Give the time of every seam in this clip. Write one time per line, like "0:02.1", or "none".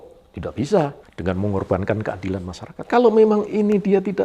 0:01.1
0:02.8

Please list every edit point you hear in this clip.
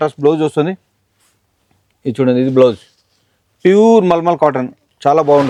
none

